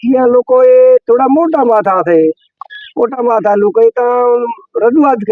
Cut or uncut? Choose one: uncut